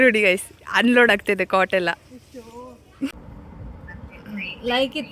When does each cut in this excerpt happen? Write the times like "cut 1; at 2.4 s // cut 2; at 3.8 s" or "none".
cut 1; at 3.2 s

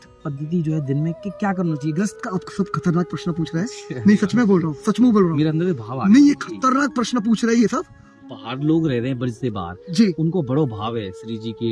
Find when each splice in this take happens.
cut 1; at 2.1 s // cut 2; at 8.2 s

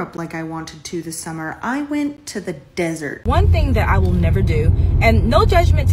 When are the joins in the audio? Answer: cut 1; at 3.1 s

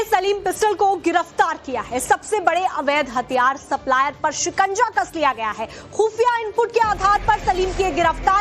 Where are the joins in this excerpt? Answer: cut 1; at 3.0 s

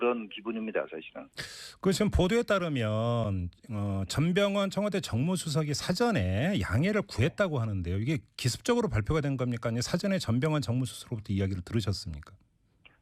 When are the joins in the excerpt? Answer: cut 1; at 1.4 s

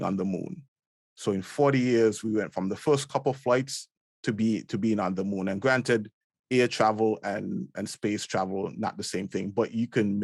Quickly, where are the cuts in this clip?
none

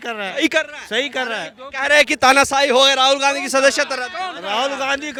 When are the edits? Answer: none

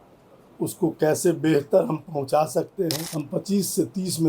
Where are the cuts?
cut 1; at 3.0 s

